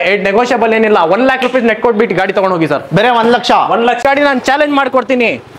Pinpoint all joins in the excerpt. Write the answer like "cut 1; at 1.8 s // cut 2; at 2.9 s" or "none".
cut 1; at 4.0 s

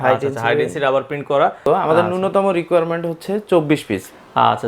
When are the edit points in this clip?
cut 1; at 1.6 s

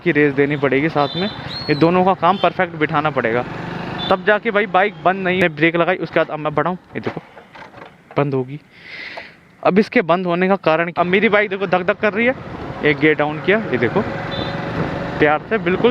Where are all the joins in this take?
cut 1; at 5.4 s // cut 2; at 10.9 s

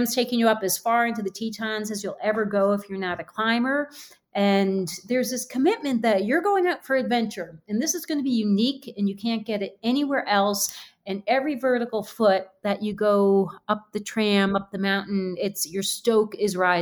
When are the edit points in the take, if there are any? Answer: none

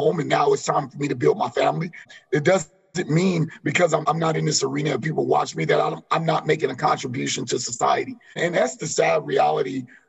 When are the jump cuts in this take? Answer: cut 1; at 2.1 s // cut 2; at 4.0 s // cut 3; at 8.4 s

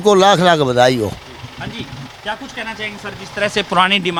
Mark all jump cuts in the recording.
none

